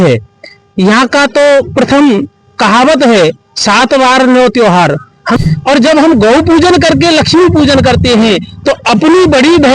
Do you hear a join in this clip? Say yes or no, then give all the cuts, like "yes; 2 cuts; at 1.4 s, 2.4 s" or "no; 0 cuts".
yes; 1 cut; at 5.4 s